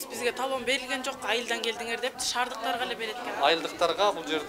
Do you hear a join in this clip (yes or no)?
yes